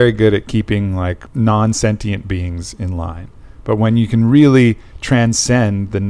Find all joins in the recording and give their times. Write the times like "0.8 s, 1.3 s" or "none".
1.2 s